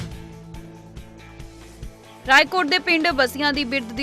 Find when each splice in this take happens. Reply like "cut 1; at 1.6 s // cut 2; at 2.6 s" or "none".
cut 1; at 2.2 s